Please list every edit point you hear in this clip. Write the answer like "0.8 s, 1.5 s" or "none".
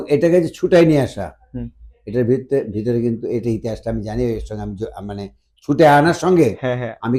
none